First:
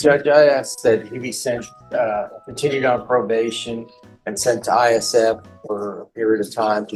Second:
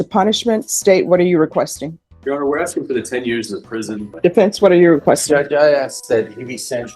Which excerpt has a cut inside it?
second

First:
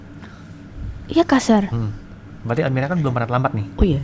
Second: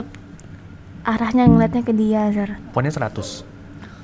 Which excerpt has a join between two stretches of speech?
second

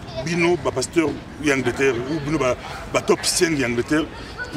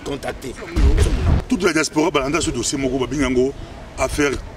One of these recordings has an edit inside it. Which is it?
second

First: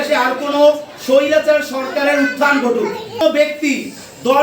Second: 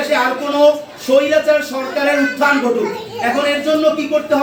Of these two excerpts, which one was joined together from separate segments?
first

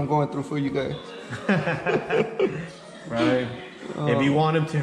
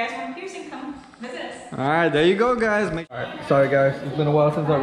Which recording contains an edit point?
second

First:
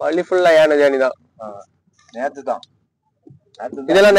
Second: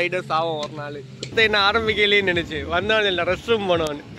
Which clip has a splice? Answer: second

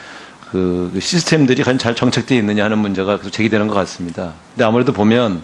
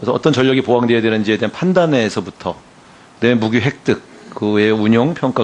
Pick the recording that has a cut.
second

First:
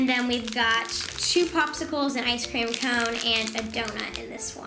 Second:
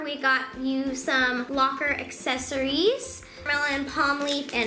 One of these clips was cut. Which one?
second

